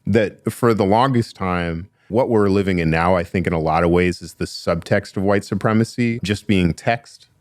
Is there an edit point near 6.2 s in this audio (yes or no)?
yes